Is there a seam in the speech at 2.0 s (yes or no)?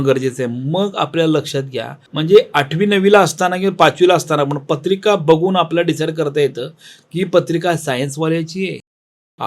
yes